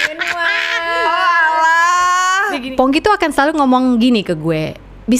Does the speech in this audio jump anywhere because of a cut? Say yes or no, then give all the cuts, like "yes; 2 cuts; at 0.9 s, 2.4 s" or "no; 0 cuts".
yes; 1 cut; at 2.7 s